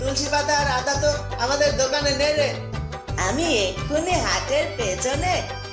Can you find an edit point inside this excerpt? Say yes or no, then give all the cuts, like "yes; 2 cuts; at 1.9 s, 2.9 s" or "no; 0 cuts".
no; 0 cuts